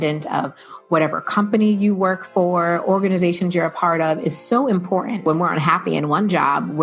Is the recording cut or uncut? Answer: cut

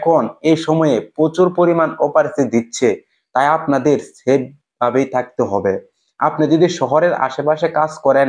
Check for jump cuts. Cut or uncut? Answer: uncut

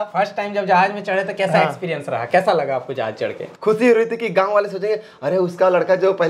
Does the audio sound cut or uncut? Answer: cut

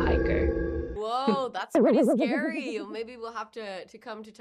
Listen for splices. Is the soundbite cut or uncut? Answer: cut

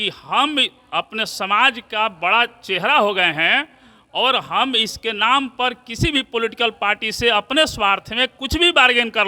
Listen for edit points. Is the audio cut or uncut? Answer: uncut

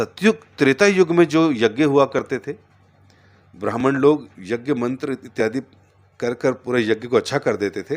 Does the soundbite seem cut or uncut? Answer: uncut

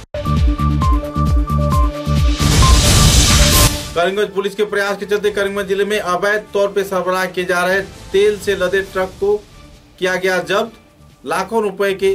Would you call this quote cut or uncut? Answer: cut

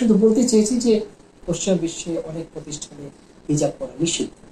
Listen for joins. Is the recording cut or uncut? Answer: cut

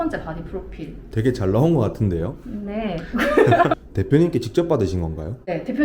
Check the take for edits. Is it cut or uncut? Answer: cut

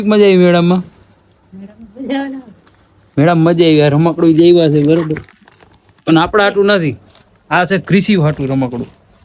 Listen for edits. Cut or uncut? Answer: uncut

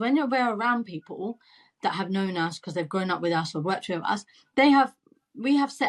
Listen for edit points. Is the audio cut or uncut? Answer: uncut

